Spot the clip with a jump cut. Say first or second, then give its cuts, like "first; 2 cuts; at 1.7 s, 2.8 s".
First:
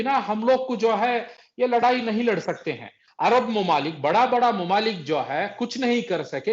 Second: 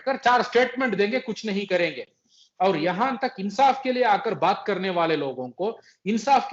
first; 1 cut; at 3.0 s